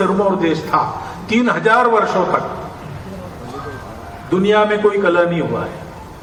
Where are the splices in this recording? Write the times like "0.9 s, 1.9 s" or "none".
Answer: none